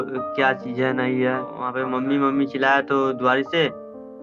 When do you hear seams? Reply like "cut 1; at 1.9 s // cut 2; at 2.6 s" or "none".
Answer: cut 1; at 1.7 s

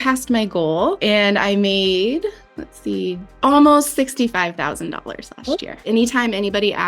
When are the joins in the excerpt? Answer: cut 1; at 1.0 s // cut 2; at 3.3 s // cut 3; at 5.8 s

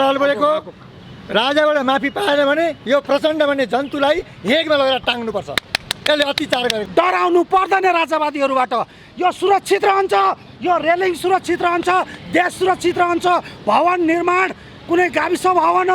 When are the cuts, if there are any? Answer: cut 1; at 6.8 s

